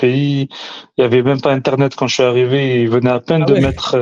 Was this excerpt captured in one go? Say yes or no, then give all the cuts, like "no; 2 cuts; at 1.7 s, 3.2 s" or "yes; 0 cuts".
yes; 0 cuts